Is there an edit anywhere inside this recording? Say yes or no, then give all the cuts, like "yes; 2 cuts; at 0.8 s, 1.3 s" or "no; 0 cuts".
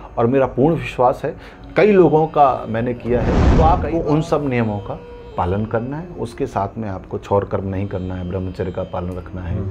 yes; 1 cut; at 3.4 s